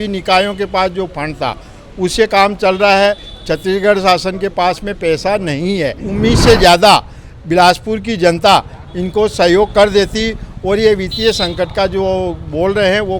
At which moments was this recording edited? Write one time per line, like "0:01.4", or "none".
0:06.0